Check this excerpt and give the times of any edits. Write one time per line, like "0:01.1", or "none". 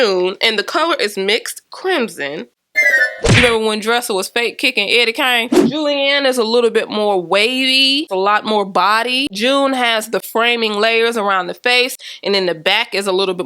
0:03.4
0:05.8